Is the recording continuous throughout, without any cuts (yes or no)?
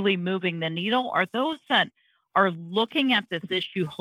yes